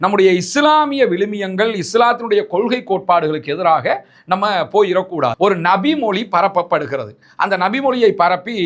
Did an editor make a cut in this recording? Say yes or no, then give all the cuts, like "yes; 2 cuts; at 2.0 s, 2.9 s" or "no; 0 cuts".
yes; 1 cut; at 5.3 s